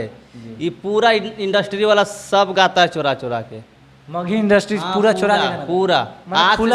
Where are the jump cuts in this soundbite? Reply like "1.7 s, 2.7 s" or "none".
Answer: none